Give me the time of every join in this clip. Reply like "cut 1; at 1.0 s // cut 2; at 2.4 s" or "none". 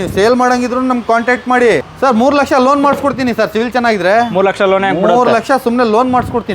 cut 1; at 1.9 s

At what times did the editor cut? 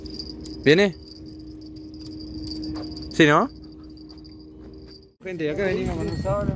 cut 1; at 5.3 s

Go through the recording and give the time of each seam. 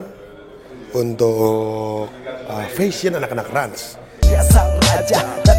cut 1; at 4.3 s

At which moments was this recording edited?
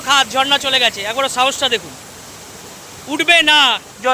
none

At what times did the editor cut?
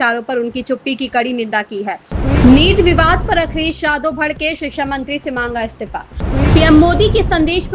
cut 1; at 2.1 s // cut 2; at 6.2 s

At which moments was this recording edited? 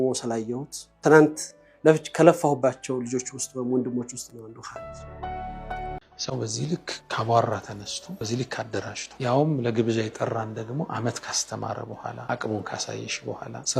cut 1; at 6.0 s

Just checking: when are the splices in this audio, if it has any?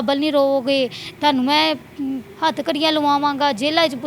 none

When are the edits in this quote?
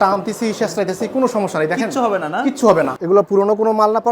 cut 1; at 3.0 s

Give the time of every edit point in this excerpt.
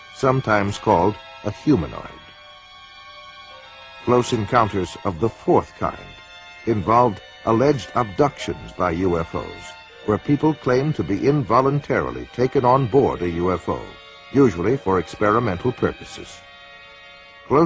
cut 1; at 15.3 s

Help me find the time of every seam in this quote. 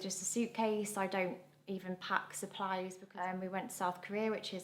cut 1; at 3.0 s

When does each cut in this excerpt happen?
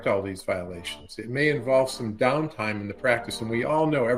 none

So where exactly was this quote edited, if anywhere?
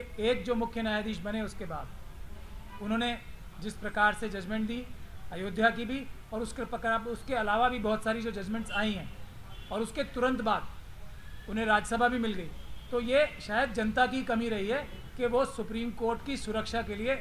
none

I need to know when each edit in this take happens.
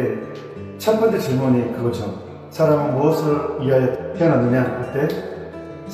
cut 1; at 4.0 s

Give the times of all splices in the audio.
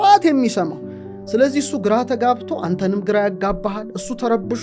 none

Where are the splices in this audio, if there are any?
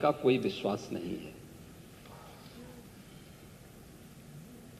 none

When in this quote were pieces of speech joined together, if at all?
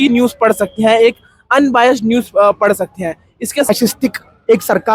cut 1; at 3.7 s

